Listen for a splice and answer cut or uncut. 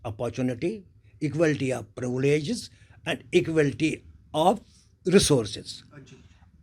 uncut